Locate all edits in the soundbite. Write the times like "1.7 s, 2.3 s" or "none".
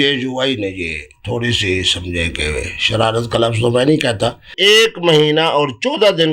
4.5 s